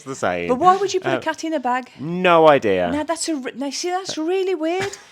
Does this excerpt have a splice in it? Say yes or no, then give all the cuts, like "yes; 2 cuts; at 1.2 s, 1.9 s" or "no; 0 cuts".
no; 0 cuts